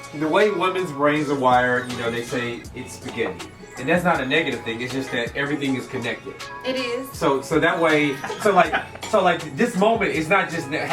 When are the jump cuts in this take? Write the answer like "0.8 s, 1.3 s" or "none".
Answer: 8.8 s